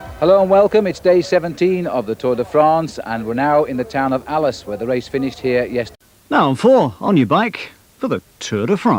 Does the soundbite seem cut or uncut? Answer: uncut